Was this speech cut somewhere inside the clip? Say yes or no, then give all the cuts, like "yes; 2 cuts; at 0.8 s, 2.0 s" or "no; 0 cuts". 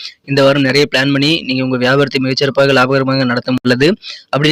yes; 1 cut; at 3.6 s